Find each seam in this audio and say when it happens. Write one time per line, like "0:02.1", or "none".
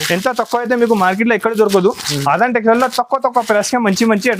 none